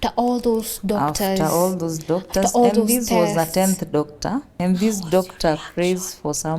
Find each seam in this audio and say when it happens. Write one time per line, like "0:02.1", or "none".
0:04.5